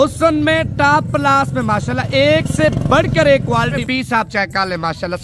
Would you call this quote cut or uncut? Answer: cut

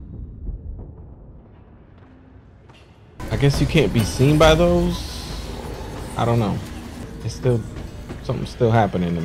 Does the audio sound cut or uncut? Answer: cut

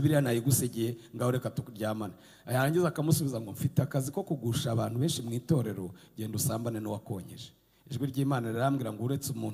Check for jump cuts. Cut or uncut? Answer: uncut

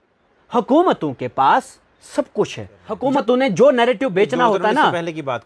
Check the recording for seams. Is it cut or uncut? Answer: cut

